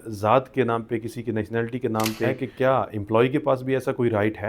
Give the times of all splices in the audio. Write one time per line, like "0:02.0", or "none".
0:02.4